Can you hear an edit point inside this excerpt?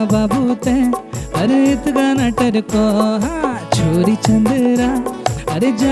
no; 0 cuts

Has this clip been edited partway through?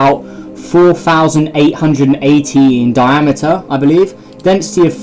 yes; 1 cut; at 3.6 s

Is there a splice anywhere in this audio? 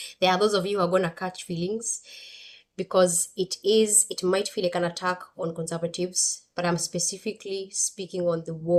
no; 0 cuts

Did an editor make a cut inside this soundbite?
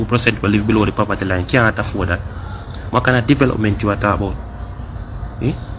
no; 0 cuts

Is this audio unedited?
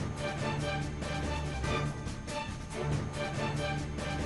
yes; 0 cuts

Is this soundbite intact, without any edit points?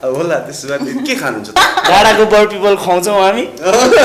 no; 1 cut; at 1.5 s

